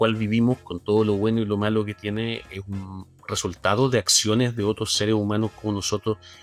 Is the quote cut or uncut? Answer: uncut